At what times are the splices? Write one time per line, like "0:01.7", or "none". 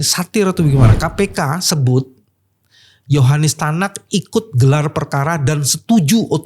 none